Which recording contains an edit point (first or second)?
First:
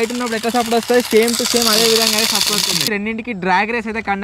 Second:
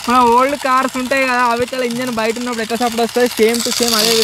first